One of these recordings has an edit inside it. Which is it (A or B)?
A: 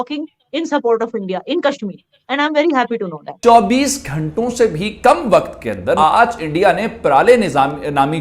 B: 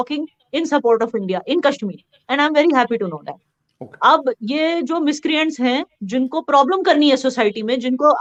A